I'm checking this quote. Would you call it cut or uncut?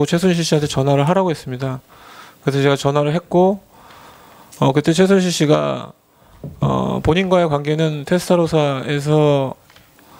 cut